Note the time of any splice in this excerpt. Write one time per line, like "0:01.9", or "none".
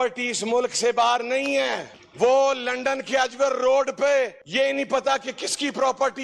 0:04.4